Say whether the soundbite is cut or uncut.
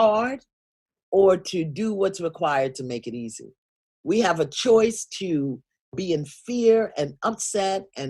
cut